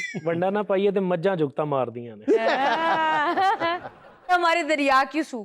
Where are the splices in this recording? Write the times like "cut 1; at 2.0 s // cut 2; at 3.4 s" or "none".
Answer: cut 1; at 4.3 s